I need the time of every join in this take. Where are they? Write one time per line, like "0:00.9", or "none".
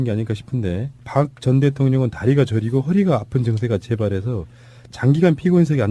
0:02.7